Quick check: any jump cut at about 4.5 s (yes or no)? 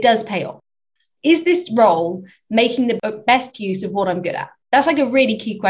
yes